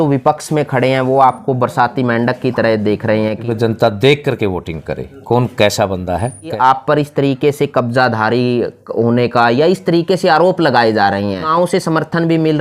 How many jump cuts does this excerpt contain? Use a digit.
3